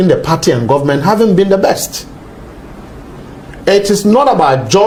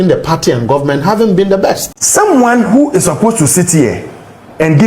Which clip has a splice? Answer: second; 1 cut; at 1.9 s

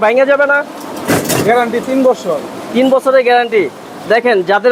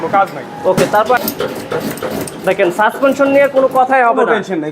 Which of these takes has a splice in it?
second; 1 cut; at 1.2 s

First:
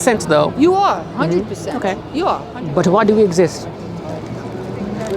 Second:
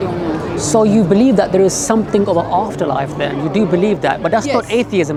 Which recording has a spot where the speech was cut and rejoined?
first; 1 cut; at 2.5 s

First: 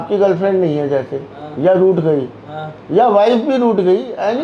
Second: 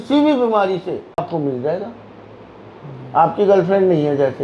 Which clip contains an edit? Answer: second; 1 cut; at 1.2 s

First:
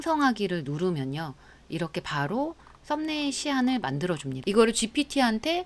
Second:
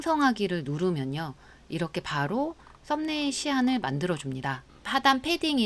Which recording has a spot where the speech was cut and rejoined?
first; 1 cut; at 4.3 s

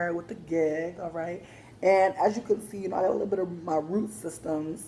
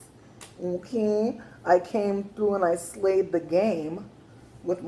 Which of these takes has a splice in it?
first; 1 cut; at 1.8 s

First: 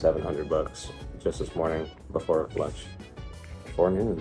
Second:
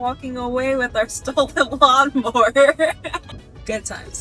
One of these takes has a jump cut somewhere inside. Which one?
second; 1 cut; at 3.3 s

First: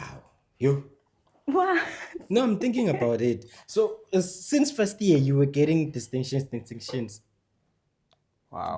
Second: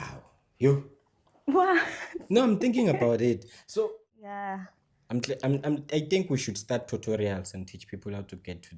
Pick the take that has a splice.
second; 1 cut; at 4.0 s

